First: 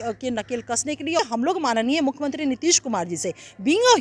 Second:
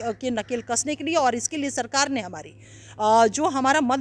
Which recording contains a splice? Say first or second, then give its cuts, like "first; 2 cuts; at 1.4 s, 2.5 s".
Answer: first; 1 cut; at 1.2 s